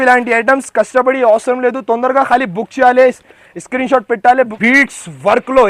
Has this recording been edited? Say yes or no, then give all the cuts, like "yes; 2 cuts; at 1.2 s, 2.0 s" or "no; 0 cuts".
yes; 1 cut; at 4.5 s